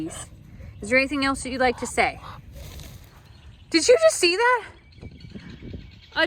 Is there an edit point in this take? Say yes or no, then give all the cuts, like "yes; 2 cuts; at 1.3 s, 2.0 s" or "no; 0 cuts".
yes; 1 cut; at 3.1 s